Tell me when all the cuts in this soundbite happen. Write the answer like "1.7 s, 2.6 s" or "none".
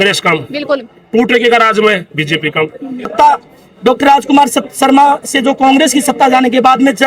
3.1 s